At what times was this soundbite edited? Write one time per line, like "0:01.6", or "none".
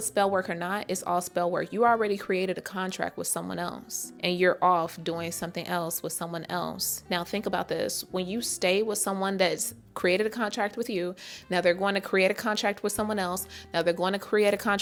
none